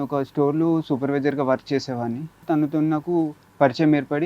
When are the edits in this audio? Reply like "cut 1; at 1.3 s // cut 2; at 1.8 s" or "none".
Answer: cut 1; at 2.4 s